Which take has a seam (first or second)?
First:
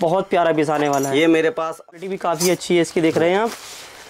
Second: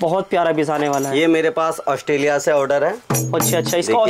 first